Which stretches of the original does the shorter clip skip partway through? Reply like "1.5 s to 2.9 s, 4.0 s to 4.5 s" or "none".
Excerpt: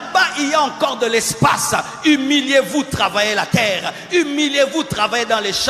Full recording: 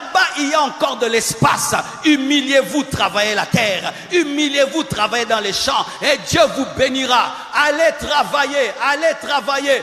none